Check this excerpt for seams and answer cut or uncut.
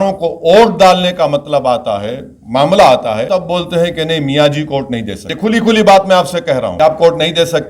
cut